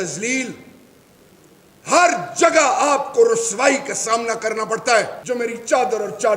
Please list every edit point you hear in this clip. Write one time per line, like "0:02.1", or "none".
0:05.2